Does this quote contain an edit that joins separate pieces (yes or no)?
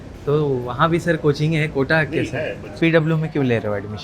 yes